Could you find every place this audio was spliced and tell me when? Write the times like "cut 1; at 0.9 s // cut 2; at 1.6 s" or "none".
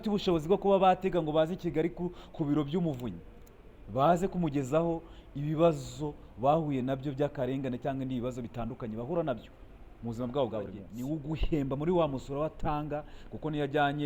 cut 1; at 10.9 s